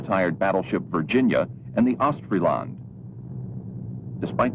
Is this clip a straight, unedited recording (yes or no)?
no